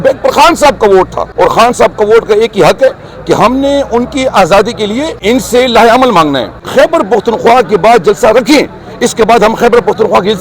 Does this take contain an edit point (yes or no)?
yes